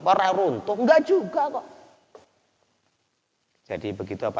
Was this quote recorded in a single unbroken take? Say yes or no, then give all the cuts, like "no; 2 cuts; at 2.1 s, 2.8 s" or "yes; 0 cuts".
yes; 0 cuts